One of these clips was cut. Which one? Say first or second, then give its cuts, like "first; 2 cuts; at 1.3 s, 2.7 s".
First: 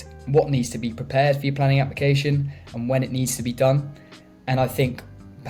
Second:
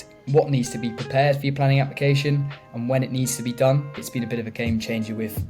second; 1 cut; at 4.1 s